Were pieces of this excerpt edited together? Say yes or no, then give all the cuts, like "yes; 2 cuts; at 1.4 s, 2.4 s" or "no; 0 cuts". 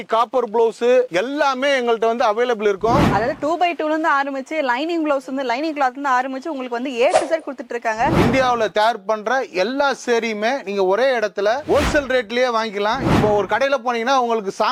yes; 3 cuts; at 3.0 s, 8.1 s, 13.1 s